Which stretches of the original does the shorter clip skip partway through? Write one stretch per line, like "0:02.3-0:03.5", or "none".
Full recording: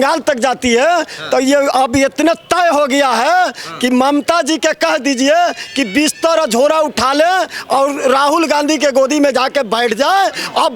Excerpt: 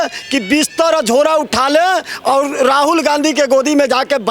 none